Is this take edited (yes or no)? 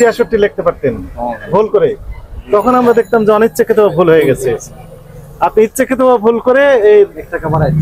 no